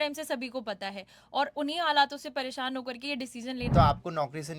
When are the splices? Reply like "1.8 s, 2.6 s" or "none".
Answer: 3.7 s